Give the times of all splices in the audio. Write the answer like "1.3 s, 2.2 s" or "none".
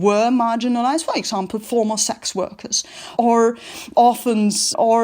3.1 s